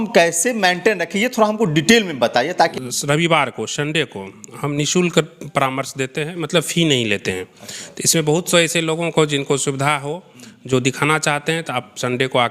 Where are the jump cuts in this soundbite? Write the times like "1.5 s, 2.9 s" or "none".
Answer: 2.7 s